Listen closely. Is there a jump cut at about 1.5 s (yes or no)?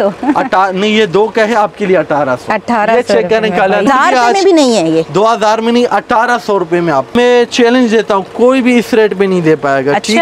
no